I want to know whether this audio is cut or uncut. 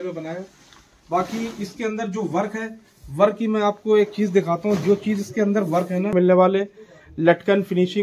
cut